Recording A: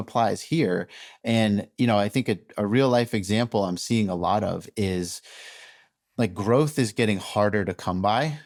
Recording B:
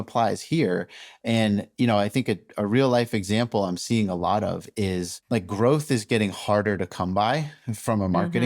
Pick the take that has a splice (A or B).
B